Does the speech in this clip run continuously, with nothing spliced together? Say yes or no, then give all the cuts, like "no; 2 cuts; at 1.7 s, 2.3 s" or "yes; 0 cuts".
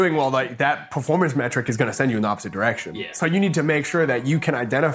yes; 0 cuts